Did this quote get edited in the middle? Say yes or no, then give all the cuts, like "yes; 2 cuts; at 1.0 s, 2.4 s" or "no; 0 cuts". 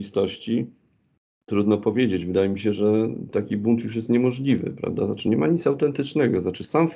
no; 0 cuts